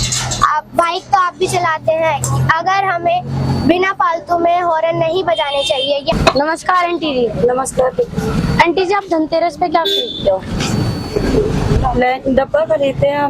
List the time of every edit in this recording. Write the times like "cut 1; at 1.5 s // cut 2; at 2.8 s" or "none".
cut 1; at 6.1 s